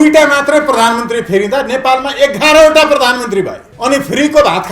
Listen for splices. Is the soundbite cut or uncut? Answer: cut